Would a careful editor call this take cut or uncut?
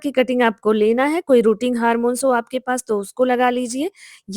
uncut